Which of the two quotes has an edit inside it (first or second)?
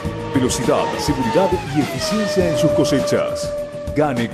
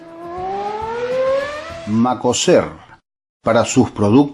second